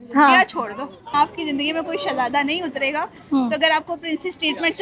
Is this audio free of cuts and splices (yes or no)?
no